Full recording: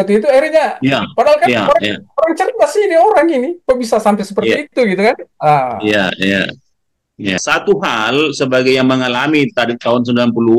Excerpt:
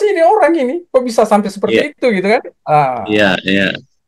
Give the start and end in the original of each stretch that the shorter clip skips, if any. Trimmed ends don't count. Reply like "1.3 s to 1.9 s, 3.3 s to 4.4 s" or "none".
none